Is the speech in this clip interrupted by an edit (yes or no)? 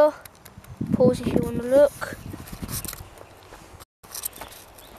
yes